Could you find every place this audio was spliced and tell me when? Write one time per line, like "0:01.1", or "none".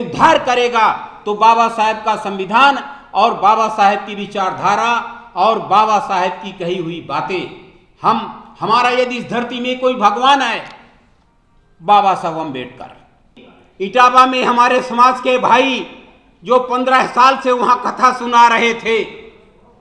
0:13.4